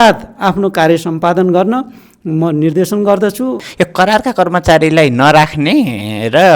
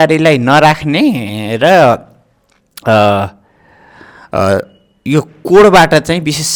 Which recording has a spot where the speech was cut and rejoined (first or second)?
first